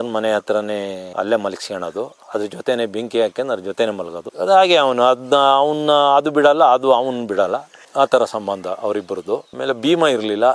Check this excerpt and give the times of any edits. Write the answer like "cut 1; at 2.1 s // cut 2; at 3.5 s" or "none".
none